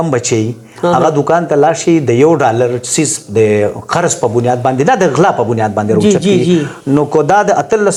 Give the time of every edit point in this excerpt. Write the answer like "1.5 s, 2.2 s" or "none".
none